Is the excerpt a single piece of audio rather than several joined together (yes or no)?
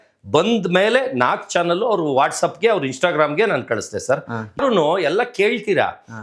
no